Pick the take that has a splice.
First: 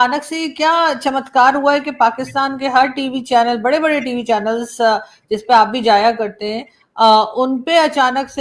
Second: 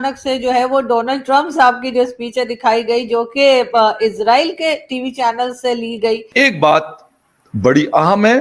second; 1 cut; at 6.3 s

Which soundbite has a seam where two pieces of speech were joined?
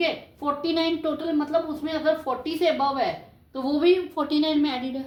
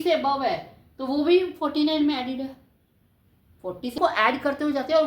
second; 1 cut; at 4.0 s

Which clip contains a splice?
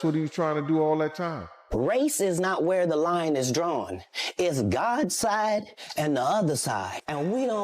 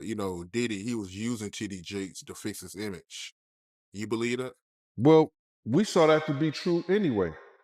first; 1 cut; at 1.6 s

